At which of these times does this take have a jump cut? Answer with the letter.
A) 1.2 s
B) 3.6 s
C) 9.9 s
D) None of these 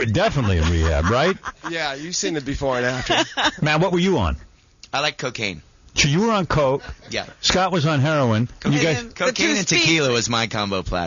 B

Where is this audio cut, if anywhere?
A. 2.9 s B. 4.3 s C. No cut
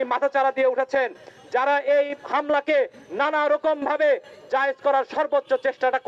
C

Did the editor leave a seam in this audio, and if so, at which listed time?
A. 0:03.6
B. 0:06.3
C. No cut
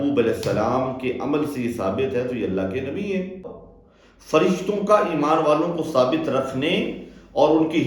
A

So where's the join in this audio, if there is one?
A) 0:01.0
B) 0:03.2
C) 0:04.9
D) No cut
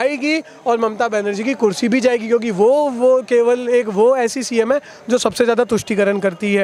D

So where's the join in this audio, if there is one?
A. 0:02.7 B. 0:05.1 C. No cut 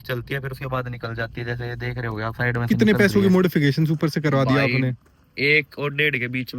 A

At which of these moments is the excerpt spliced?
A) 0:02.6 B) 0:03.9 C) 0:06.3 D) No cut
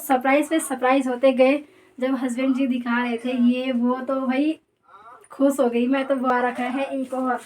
C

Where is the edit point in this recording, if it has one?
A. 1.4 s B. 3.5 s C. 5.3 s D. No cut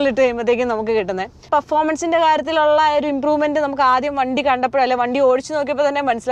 A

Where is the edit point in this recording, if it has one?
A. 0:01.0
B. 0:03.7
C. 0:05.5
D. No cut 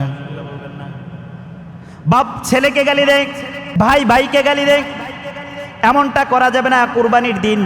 B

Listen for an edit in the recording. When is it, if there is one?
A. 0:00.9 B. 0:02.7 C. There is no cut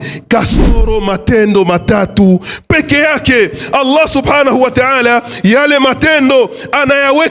C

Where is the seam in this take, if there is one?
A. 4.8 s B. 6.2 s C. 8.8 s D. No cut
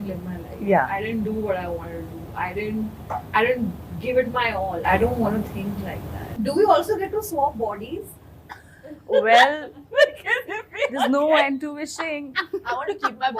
B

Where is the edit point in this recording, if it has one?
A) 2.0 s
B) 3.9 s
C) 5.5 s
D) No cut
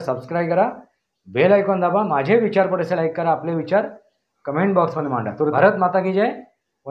C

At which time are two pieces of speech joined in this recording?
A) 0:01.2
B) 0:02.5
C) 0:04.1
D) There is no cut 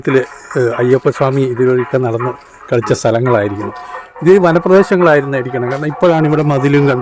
D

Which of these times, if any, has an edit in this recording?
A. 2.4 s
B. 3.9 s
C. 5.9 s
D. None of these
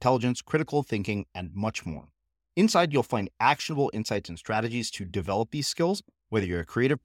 D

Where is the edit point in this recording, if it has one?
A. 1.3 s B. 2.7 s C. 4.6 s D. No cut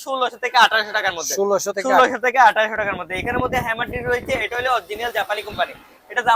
D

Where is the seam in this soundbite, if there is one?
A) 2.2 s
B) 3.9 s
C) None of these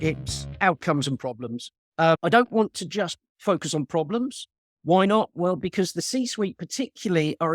A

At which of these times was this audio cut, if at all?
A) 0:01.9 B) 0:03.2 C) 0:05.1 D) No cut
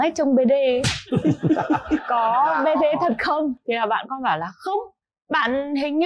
D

